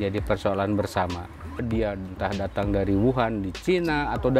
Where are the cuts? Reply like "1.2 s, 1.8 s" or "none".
1.6 s